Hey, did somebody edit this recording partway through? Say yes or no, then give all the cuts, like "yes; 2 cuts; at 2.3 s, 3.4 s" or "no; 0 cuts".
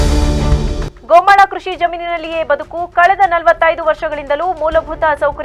no; 0 cuts